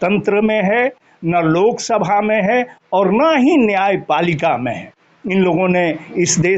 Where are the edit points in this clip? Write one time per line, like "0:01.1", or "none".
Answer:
none